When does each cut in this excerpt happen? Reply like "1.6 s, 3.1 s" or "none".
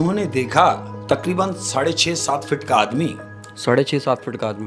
none

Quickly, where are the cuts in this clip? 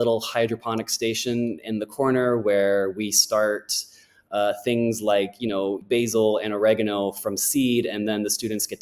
5.8 s

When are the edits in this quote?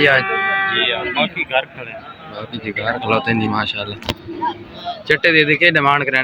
none

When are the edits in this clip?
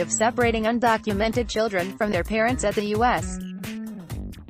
3.2 s

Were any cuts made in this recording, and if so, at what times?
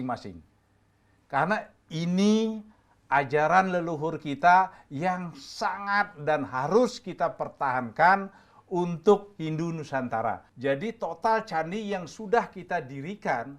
10.5 s

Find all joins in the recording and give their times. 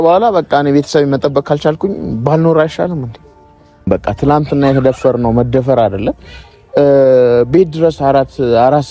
3.8 s

